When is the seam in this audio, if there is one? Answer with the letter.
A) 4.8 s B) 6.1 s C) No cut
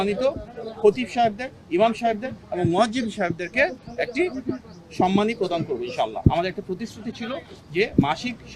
B